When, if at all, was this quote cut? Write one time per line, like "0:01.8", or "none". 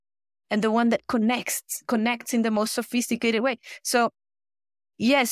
none